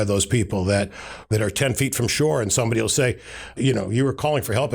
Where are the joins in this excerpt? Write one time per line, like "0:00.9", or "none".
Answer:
0:01.2
0:03.6

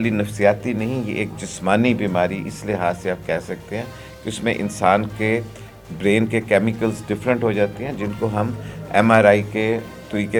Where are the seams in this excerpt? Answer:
none

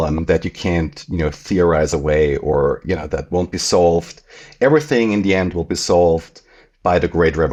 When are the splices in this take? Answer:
none

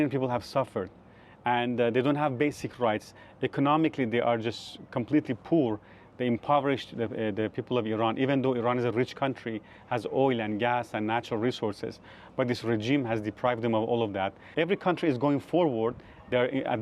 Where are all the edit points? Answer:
0:14.4

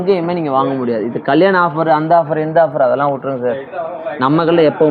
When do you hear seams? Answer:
none

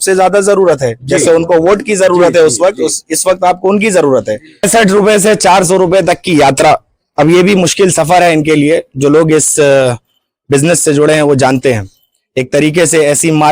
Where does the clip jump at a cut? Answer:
0:04.7

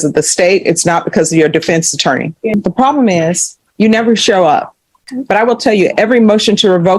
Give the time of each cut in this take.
0:02.5
0:05.1

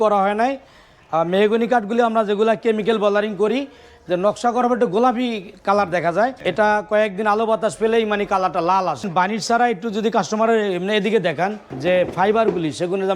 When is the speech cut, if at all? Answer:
0:06.4
0:09.1
0:11.7

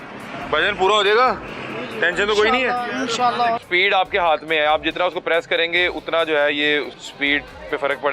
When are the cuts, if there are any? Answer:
0:03.6
0:07.0

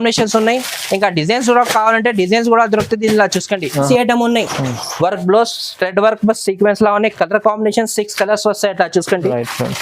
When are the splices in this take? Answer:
0:03.9

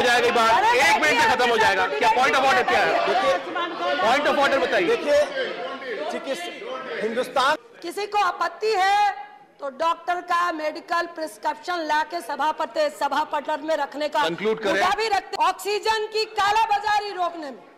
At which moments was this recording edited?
0:07.6
0:15.3

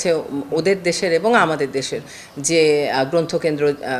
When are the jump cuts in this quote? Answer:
none

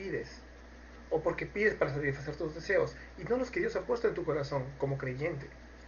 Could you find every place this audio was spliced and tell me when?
0:04.5

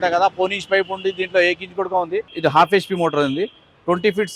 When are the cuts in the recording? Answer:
0:02.2

